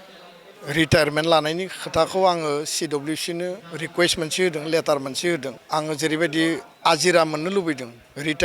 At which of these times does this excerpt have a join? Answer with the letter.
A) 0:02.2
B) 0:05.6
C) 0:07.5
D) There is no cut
B